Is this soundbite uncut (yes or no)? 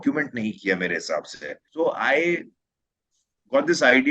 no